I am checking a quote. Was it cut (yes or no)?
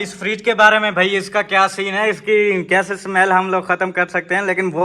no